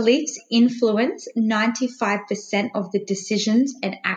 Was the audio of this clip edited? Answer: no; 0 cuts

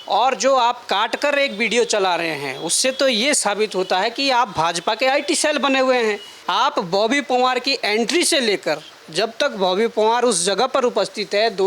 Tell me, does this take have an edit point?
yes; 1 cut; at 6.3 s

